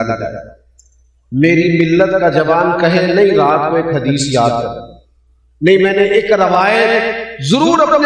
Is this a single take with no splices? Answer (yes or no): yes